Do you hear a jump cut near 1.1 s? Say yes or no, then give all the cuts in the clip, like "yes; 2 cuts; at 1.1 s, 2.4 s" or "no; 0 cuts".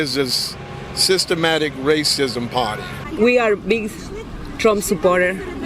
no; 1 cut; at 3.0 s